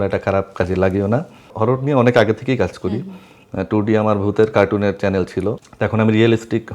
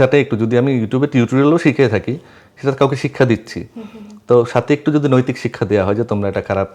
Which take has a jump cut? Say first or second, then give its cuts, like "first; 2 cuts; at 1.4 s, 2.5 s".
first; 2 cuts; at 1.5 s, 5.7 s